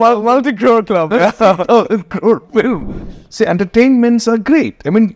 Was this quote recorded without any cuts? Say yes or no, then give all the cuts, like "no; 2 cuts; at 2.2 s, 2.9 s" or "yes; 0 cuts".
no; 1 cut; at 2.9 s